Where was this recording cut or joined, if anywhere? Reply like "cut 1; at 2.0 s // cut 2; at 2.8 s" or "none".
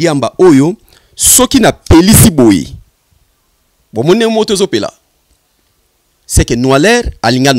none